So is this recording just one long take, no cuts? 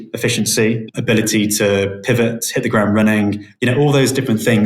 no; 1 cut; at 1.0 s

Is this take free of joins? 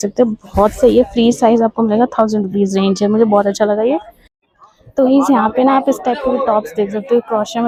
yes; 0 cuts

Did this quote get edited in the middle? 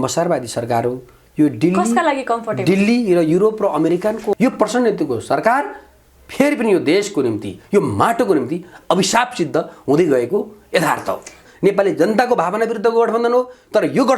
yes; 2 cuts; at 4.3 s, 11.4 s

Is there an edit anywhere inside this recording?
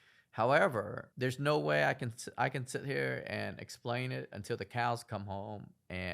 yes; 1 cut; at 1.0 s

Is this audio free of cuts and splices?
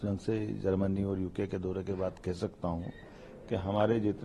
yes; 0 cuts

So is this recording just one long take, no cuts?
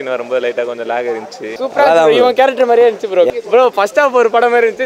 no; 2 cuts; at 1.5 s, 3.3 s

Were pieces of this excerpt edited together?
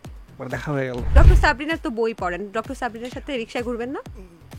yes; 1 cut; at 1.1 s

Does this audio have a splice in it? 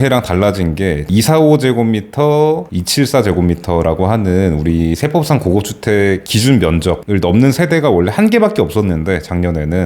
yes; 1 cut; at 1.1 s

